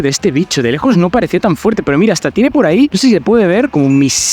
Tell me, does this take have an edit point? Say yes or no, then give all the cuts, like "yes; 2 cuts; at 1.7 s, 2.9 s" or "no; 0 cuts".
no; 0 cuts